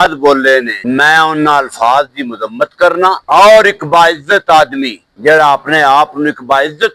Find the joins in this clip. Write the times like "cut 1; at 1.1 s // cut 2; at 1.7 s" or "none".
cut 1; at 3.2 s

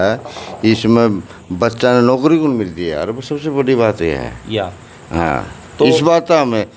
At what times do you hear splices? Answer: none

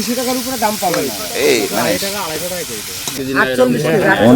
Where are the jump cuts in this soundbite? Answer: cut 1; at 3.1 s

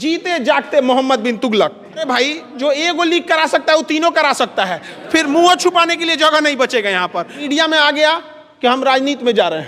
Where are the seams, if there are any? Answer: cut 1; at 2.1 s // cut 2; at 7.4 s

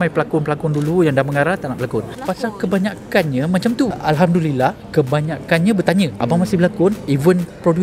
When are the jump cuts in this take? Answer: cut 1; at 2.1 s // cut 2; at 4.0 s // cut 3; at 5.9 s

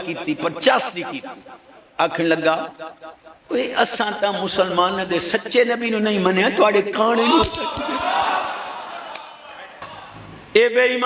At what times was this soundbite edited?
cut 1; at 9.9 s

